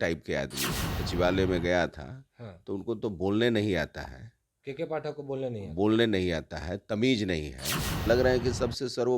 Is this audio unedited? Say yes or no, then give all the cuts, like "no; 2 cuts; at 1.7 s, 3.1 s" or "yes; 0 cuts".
no; 2 cuts; at 1.0 s, 8.0 s